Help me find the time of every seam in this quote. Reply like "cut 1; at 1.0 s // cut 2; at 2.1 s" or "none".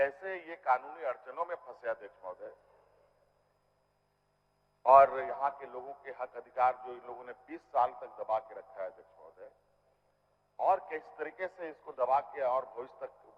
none